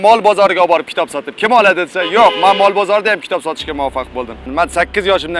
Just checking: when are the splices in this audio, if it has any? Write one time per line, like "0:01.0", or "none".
0:04.5